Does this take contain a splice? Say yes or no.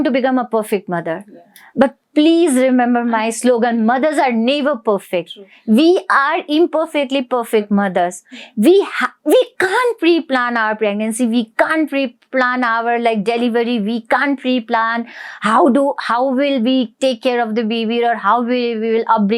no